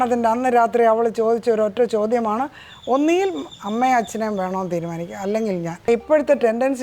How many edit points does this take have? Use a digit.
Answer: 1